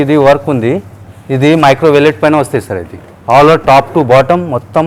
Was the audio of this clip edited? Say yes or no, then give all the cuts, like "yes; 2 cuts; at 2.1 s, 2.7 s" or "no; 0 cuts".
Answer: no; 0 cuts